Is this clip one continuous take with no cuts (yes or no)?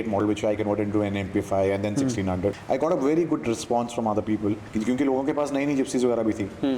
no